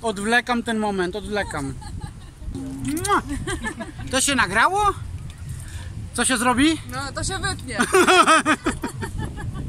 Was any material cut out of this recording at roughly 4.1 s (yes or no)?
no